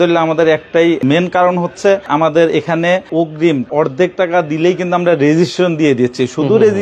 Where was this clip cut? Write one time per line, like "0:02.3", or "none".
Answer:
0:01.0
0:02.1
0:03.7